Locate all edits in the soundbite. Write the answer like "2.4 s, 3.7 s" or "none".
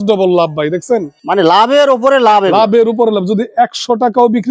none